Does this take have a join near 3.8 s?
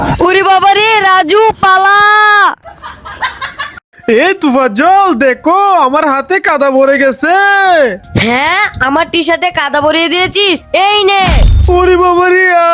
yes; 1 cut; at 3.8 s

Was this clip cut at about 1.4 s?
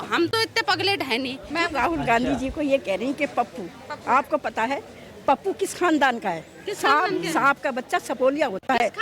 yes; 1 cut; at 1.4 s

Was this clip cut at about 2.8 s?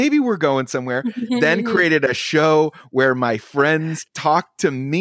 no; 1 cut; at 4.1 s

